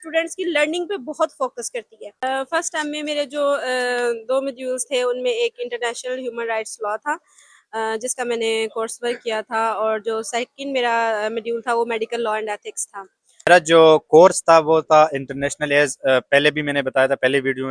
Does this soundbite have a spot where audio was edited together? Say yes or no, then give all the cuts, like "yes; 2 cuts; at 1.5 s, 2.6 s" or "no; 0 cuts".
yes; 2 cuts; at 2.1 s, 13.2 s